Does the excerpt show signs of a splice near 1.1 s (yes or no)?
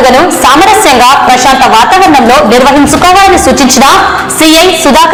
no